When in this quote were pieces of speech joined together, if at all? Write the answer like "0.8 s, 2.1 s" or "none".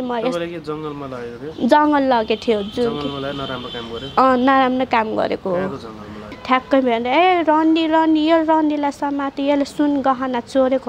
6.3 s

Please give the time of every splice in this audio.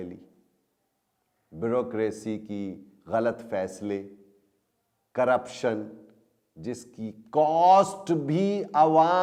none

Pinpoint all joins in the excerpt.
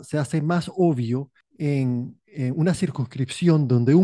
1.4 s

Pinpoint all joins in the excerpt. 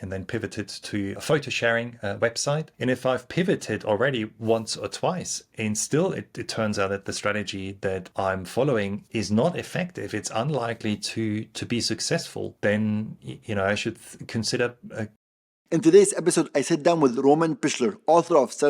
1.2 s, 2.7 s, 8.1 s, 9.0 s, 12.5 s, 15.2 s

